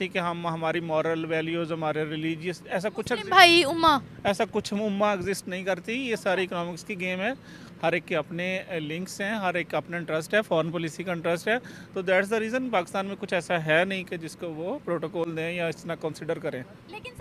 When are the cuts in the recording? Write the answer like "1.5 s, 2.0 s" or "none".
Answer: none